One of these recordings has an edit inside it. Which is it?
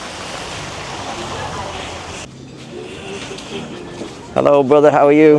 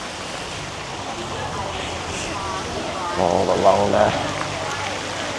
first; 1 cut; at 2.2 s

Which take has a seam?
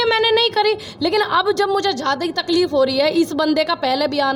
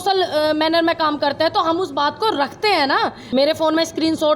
second; 1 cut; at 3.2 s

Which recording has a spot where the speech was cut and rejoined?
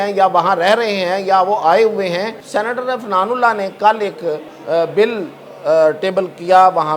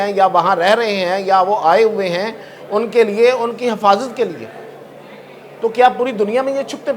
first; 2 cuts; at 2.4 s, 4.5 s

